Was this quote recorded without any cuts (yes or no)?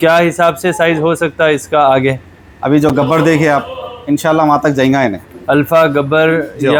yes